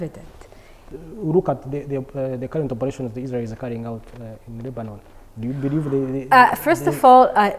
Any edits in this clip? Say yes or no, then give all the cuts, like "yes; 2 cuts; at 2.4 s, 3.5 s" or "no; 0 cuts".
yes; 1 cut; at 0.9 s